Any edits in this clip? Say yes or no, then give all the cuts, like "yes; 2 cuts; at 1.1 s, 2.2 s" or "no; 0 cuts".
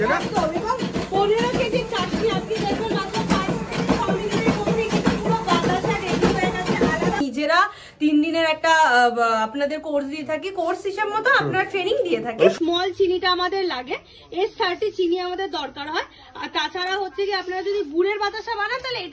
yes; 2 cuts; at 7.2 s, 12.5 s